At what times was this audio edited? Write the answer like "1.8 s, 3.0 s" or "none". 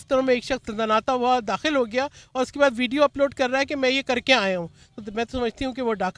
none